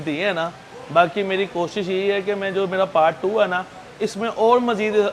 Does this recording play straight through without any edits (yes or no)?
yes